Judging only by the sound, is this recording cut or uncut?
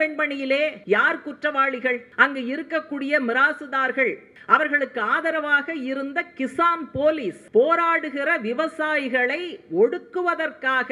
cut